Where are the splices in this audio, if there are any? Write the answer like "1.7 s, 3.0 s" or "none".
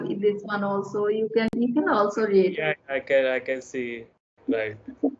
none